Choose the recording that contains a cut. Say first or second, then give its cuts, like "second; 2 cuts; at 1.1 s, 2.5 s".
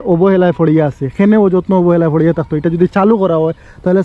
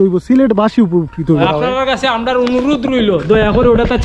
second; 1 cut; at 1.4 s